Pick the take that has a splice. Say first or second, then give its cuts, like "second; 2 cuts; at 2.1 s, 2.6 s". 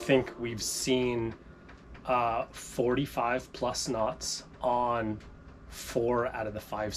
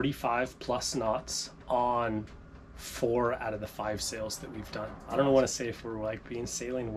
second; 1 cut; at 4.9 s